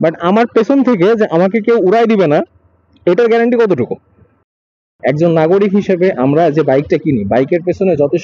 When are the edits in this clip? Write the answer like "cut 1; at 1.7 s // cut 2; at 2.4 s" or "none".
cut 1; at 4.9 s